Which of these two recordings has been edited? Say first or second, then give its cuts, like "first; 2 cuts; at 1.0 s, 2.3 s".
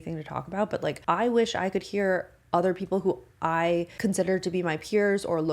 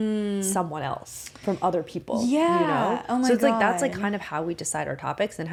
first; 2 cuts; at 1.0 s, 3.9 s